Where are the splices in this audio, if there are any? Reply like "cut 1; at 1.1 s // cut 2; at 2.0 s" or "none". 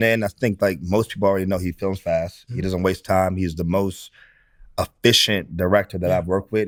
none